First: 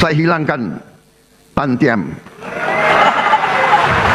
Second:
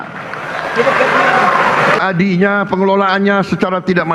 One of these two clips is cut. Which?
second; 1 cut; at 2.0 s

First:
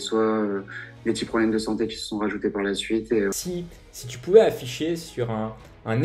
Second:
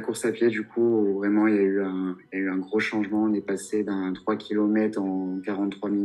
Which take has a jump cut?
first; 1 cut; at 3.3 s

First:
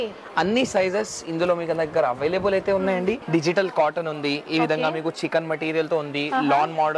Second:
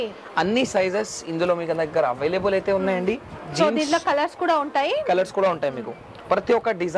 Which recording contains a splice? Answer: first; 1 cut; at 3.2 s

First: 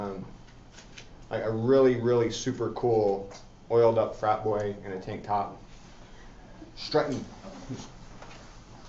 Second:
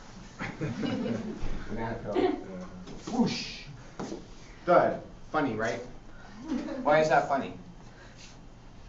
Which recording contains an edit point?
first; 1 cut; at 5.1 s

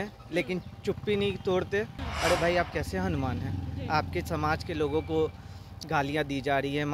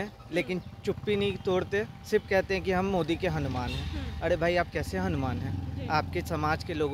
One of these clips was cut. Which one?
first; 1 cut; at 2.0 s

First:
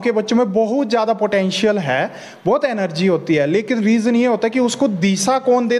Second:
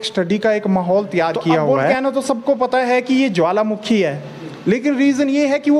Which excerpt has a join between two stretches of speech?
second; 1 cut; at 1.8 s

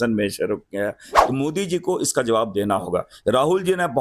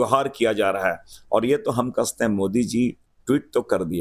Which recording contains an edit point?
first; 1 cut; at 1.1 s

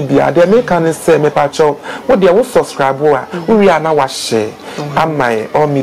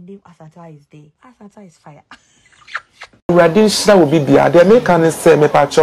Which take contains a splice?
second; 2 cuts; at 1.1 s, 3.2 s

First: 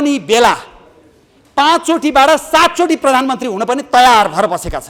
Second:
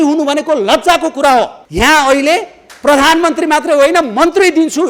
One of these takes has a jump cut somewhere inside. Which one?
second; 1 cut; at 1.6 s

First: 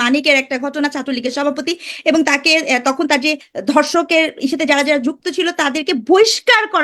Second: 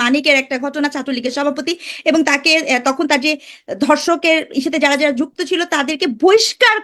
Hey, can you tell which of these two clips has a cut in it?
first; 1 cut; at 3.5 s

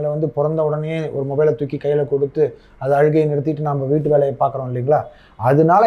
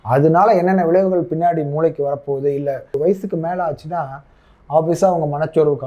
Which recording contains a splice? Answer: second; 1 cut; at 3.0 s

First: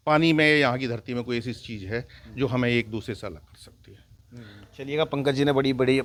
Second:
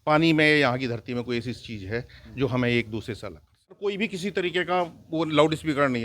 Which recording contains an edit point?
second; 1 cut; at 3.8 s

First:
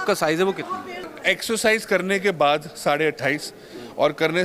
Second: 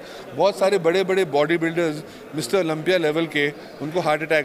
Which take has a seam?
first; 1 cut; at 1.1 s

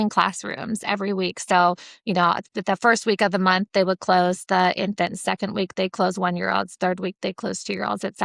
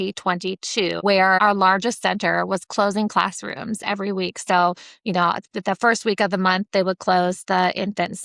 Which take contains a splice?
second; 1 cut; at 1.4 s

